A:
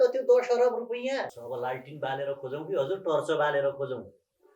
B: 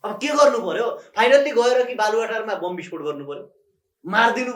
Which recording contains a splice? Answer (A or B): A